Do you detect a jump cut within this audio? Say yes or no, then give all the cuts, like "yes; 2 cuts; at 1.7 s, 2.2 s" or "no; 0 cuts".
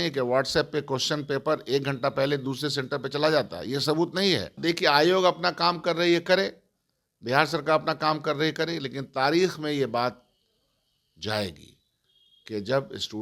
yes; 1 cut; at 4.5 s